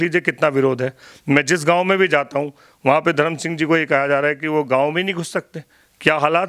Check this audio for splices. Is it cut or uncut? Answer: uncut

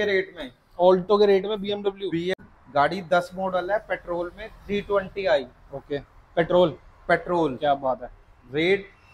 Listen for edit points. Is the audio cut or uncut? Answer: cut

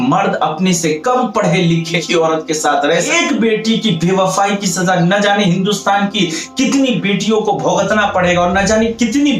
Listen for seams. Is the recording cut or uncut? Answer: cut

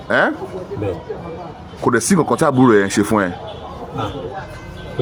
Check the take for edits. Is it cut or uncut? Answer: uncut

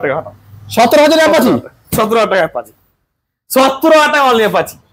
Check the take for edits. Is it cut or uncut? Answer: uncut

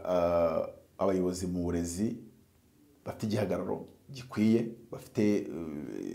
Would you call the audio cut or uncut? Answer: uncut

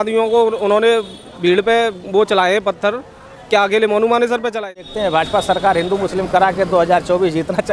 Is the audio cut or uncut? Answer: cut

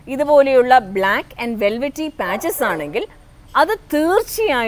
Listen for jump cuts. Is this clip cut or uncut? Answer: uncut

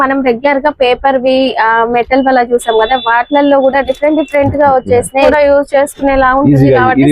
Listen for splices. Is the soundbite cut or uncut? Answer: cut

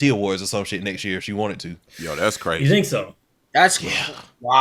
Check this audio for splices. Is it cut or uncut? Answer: uncut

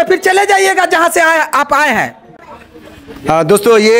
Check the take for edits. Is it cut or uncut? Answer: uncut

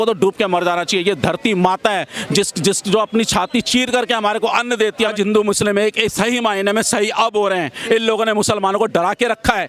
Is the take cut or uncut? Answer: cut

